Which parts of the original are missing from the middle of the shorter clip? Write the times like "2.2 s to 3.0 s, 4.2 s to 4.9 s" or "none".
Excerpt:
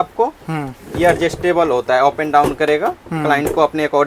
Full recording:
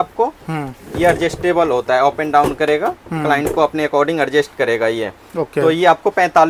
none